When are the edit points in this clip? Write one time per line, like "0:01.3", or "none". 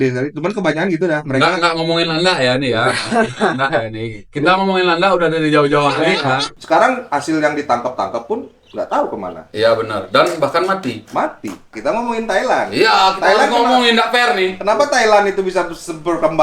0:06.5
0:11.7